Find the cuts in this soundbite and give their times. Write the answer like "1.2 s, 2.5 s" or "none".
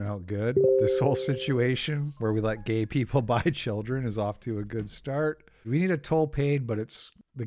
5.7 s